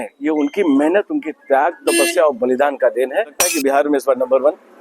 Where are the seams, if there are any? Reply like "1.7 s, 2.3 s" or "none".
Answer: 3.6 s